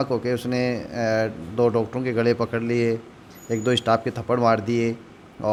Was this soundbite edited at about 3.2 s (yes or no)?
no